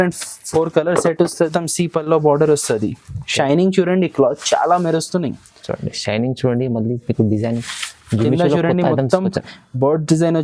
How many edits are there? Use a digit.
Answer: 1